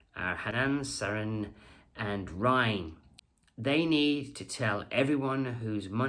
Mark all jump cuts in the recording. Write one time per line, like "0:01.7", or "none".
none